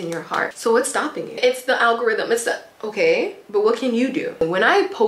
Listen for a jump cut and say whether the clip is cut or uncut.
cut